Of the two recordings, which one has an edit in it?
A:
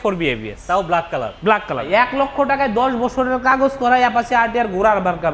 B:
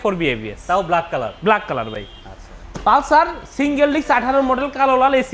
A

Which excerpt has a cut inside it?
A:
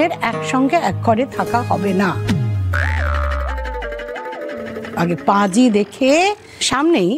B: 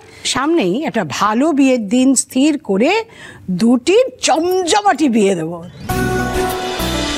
A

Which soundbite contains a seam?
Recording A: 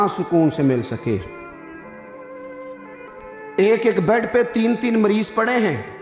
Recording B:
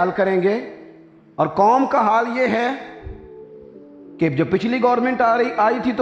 A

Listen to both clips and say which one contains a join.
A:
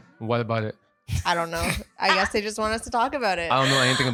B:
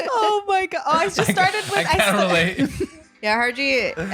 B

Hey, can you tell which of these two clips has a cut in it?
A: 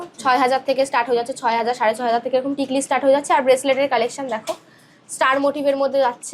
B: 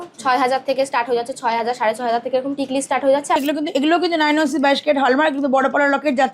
B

